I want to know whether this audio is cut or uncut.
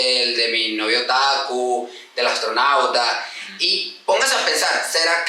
uncut